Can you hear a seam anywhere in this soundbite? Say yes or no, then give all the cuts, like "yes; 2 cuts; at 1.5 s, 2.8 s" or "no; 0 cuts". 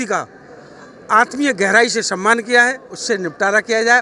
yes; 1 cut; at 3.0 s